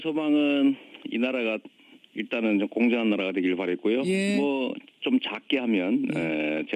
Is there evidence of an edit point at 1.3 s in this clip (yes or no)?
yes